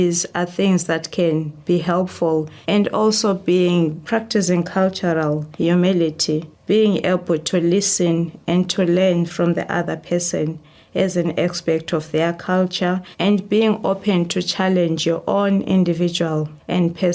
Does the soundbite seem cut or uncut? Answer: cut